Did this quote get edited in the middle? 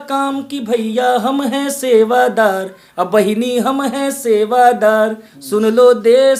no; 0 cuts

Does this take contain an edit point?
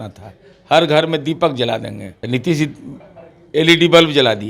yes; 1 cut; at 2.1 s

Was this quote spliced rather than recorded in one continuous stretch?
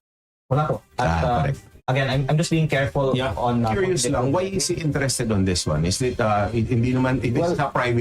yes; 1 cut; at 3.7 s

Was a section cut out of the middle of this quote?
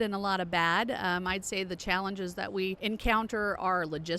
yes; 1 cut; at 2.8 s

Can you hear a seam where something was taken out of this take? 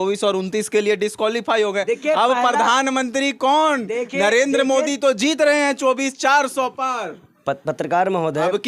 no; 0 cuts

